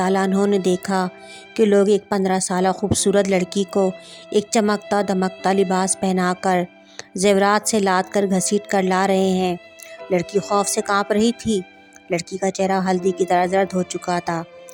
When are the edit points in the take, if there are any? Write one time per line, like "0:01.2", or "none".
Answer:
none